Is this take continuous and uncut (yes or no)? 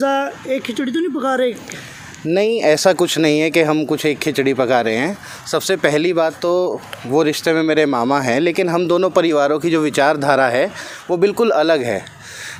yes